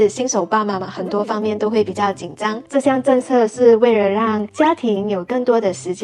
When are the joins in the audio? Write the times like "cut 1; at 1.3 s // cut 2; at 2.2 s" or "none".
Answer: cut 1; at 2.6 s